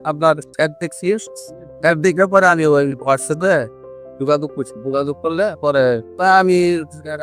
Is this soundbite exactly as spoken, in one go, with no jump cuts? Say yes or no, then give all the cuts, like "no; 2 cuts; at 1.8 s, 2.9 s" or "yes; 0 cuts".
yes; 0 cuts